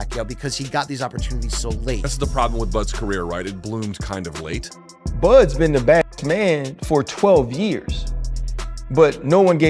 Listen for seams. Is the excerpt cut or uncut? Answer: cut